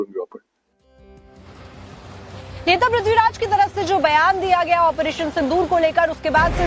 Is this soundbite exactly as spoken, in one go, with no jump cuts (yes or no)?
no